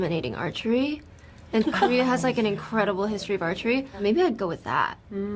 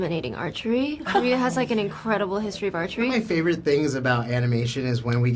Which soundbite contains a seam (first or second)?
second